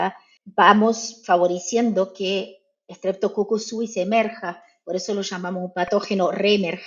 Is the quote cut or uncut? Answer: uncut